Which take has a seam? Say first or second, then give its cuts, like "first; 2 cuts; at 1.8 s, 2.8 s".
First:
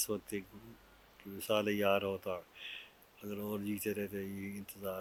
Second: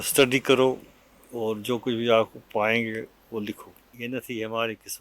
second; 1 cut; at 3.9 s